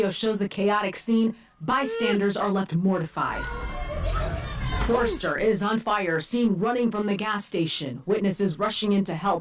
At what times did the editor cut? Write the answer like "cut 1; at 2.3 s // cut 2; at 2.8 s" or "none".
cut 1; at 5.6 s

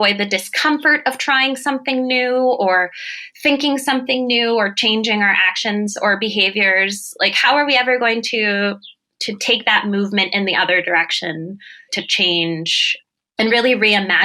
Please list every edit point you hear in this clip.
none

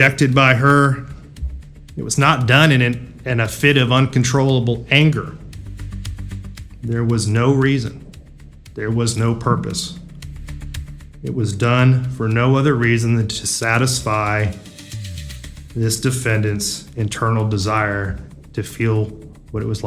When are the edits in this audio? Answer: none

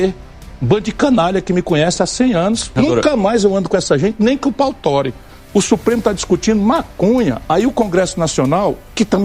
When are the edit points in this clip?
cut 1; at 2.7 s // cut 2; at 5.2 s

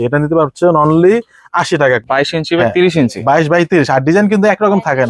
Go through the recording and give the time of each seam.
cut 1; at 2.0 s

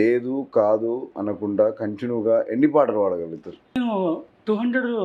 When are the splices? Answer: cut 1; at 1.1 s // cut 2; at 3.8 s

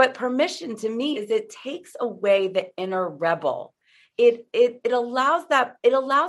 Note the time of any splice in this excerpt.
cut 1; at 1.2 s

